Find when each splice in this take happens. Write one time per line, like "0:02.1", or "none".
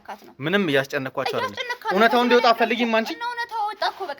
none